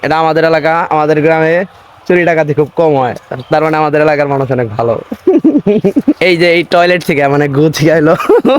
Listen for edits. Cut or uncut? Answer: cut